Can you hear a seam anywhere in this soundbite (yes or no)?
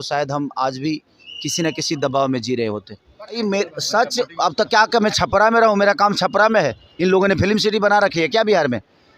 yes